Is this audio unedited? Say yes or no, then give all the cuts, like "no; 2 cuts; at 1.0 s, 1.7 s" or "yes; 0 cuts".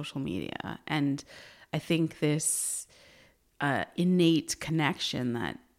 yes; 0 cuts